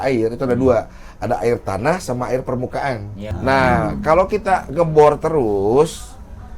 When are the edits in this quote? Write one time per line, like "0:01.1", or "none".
0:03.2